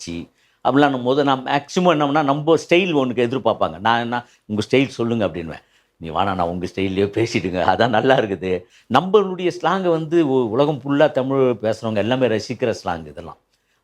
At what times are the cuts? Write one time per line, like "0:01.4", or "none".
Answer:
0:08.7